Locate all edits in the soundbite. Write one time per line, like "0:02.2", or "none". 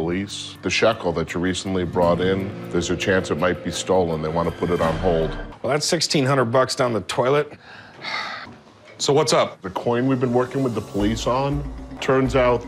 0:08.5